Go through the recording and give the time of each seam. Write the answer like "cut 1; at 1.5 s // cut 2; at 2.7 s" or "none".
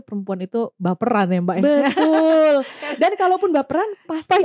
none